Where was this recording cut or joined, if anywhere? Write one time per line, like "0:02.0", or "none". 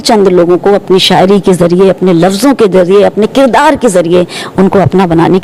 none